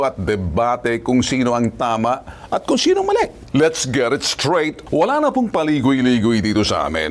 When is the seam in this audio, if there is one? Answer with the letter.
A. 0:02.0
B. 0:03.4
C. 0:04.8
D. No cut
B